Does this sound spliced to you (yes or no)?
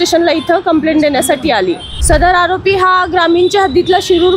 yes